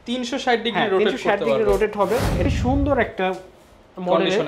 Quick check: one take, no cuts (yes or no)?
no